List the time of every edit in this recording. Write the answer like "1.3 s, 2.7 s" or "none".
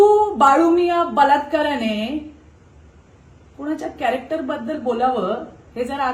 none